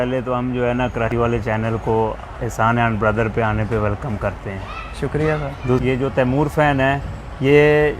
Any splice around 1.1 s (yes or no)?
yes